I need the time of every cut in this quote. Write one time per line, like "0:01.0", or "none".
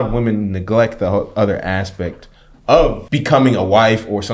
0:03.0